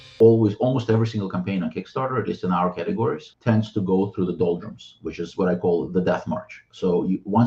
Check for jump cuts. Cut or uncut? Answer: cut